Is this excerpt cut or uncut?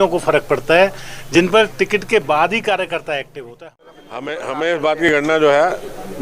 cut